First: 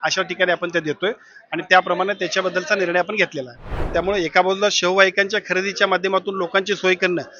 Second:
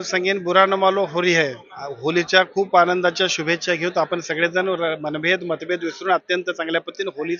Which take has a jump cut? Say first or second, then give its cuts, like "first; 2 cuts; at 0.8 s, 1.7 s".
first; 1 cut; at 3.9 s